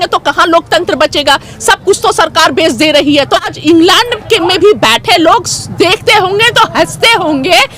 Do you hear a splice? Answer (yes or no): yes